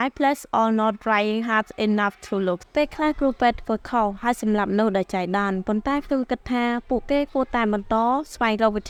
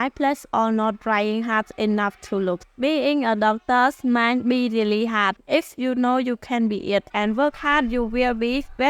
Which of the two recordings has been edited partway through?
second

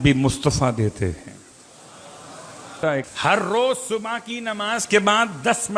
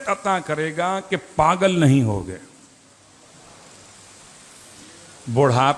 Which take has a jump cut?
first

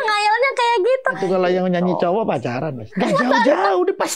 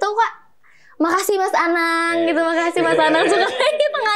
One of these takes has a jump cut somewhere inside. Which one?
first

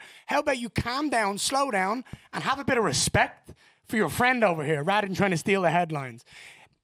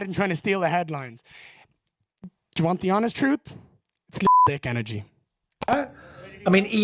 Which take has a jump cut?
second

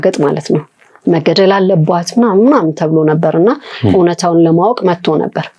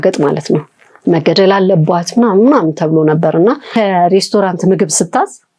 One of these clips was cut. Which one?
second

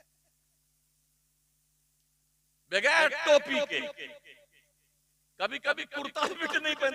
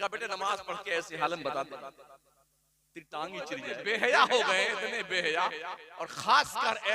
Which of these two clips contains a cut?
second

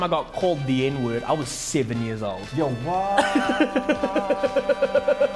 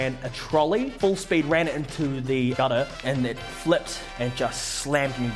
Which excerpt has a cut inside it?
second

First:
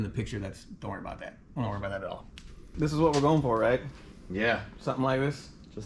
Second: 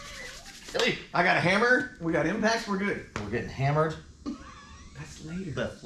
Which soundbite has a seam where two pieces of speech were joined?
first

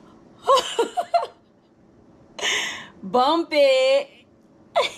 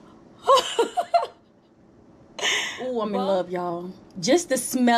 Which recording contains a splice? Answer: second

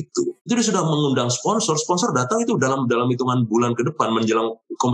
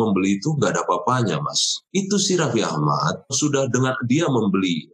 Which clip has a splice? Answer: second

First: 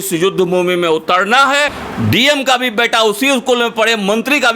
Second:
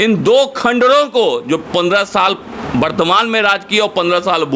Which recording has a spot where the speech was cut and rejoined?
first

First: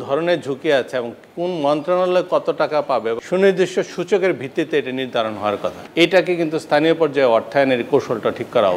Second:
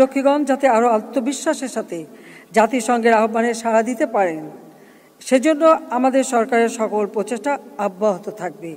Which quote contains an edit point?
first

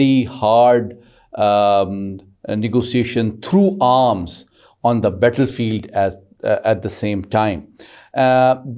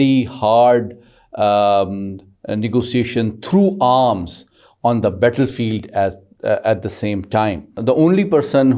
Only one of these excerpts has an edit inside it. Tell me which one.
second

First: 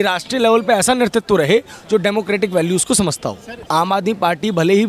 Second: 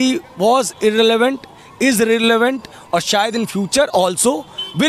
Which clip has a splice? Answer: first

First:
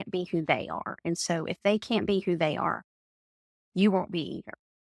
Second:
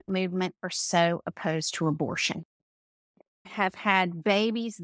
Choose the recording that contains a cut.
second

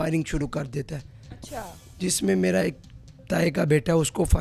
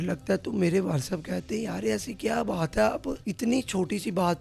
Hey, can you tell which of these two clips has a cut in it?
second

